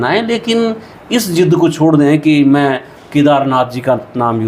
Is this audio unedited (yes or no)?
yes